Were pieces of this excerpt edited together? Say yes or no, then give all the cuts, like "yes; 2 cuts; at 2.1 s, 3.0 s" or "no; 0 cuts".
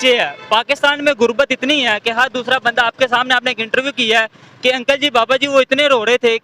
no; 0 cuts